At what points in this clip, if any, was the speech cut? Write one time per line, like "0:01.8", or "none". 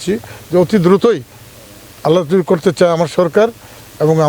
none